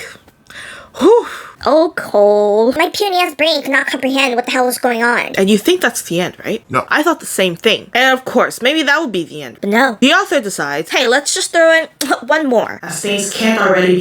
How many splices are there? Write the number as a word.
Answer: five